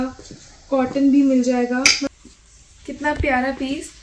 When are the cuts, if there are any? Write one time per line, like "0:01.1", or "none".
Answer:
0:02.1

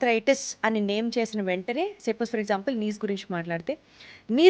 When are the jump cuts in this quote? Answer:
none

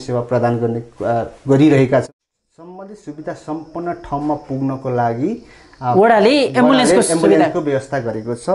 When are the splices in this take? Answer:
0:02.1

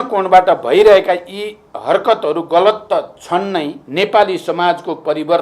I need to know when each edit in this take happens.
0:03.8

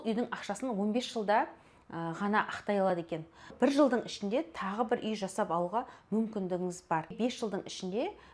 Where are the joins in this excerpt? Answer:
0:03.5
0:07.2

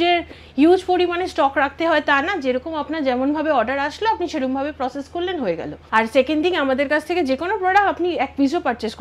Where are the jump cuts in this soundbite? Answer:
0:05.7

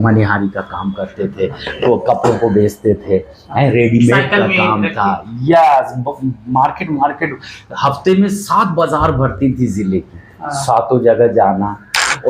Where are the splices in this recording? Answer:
none

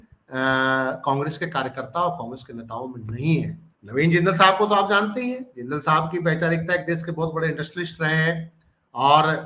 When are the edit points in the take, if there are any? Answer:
0:03.6

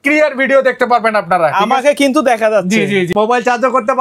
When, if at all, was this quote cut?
0:03.1

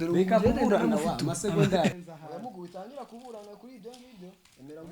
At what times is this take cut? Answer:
0:01.9

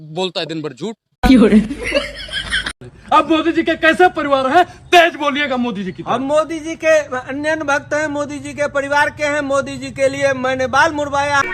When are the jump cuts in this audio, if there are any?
0:01.1
0:02.9

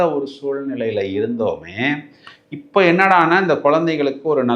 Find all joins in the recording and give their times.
none

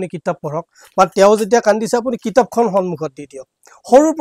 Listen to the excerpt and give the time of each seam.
none

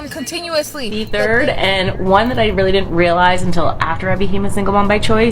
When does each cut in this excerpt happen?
0:01.0

